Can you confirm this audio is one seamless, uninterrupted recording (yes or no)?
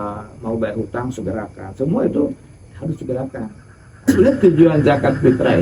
no